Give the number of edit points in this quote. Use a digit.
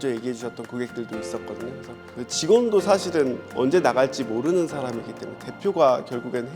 1